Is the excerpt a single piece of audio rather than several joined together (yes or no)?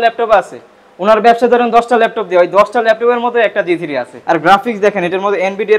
no